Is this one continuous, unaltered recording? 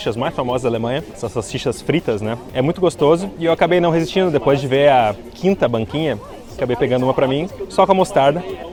yes; 0 cuts

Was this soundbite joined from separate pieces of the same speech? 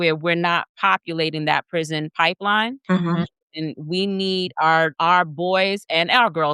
no; 0 cuts

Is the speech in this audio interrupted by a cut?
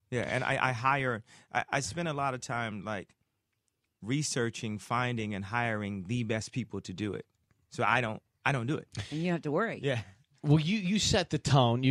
yes; 1 cut; at 9.8 s

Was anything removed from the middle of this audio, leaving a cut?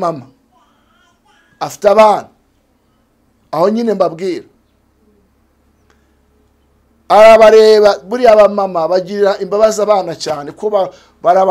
no; 0 cuts

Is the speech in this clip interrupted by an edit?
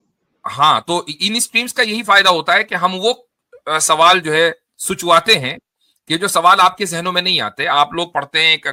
no; 0 cuts

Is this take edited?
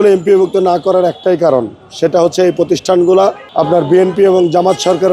no; 0 cuts

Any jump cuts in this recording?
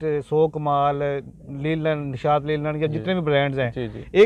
no; 0 cuts

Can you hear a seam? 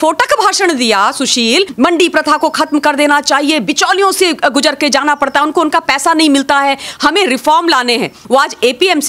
yes; 2 cuts; at 1.7 s, 8.2 s

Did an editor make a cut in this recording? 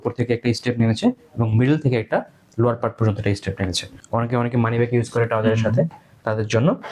yes; 1 cut; at 3.9 s

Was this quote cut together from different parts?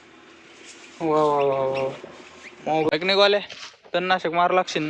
yes; 1 cut; at 2.9 s

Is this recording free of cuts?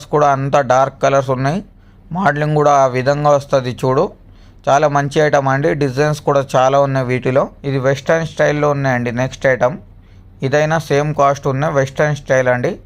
no; 1 cut; at 7.6 s

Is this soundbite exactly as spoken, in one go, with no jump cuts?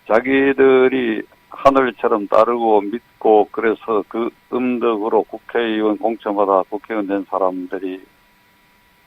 no; 1 cut; at 7.5 s

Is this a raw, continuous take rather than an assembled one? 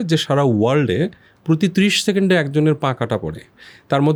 yes; 0 cuts

